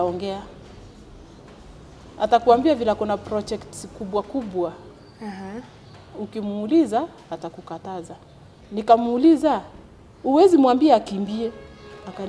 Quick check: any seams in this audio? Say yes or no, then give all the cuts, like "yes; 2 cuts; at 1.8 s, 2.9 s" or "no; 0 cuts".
yes; 1 cut; at 8.5 s